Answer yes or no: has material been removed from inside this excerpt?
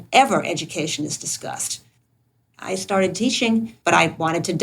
yes